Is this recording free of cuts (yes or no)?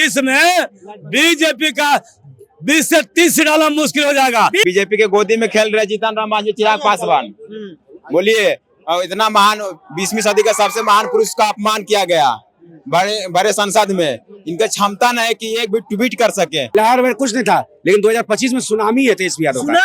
no